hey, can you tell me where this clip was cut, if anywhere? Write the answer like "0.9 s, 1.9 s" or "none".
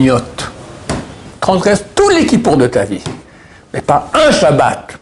1.3 s